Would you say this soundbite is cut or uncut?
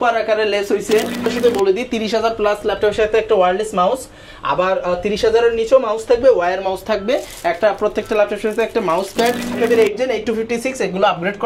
cut